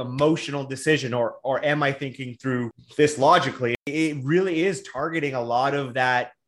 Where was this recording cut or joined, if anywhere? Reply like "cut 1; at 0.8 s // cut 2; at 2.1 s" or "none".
cut 1; at 2.8 s // cut 2; at 3.9 s

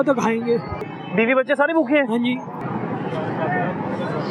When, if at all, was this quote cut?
cut 1; at 0.9 s // cut 2; at 2.6 s

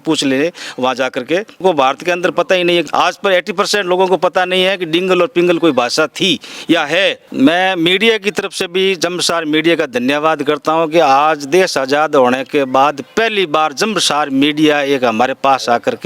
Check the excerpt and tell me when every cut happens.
cut 1; at 1.6 s // cut 2; at 2.9 s // cut 3; at 7.2 s

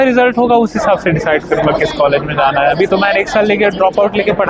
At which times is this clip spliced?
none

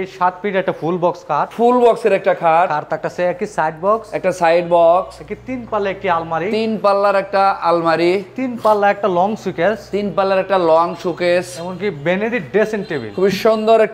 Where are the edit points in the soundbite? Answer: cut 1; at 1.5 s

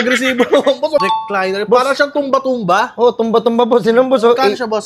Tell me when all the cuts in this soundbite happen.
cut 1; at 1.0 s

